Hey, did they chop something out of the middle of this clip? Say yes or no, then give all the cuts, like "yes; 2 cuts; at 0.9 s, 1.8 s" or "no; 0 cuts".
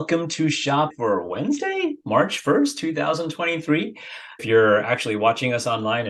yes; 2 cuts; at 0.9 s, 4.4 s